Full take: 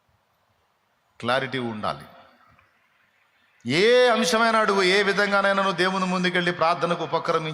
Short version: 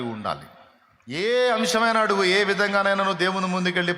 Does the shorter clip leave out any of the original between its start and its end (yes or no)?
yes